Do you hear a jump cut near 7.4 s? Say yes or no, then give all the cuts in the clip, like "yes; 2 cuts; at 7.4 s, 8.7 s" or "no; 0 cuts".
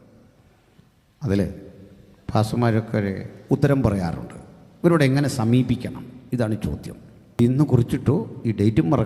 yes; 1 cut; at 7.4 s